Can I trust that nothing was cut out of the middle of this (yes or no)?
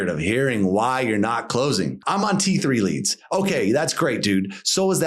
no